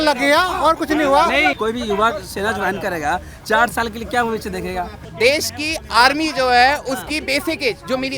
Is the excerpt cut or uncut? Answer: cut